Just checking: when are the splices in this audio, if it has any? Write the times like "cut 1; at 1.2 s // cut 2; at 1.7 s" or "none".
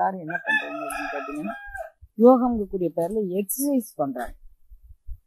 none